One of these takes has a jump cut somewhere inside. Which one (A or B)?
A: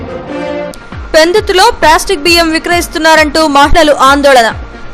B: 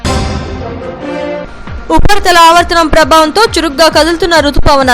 B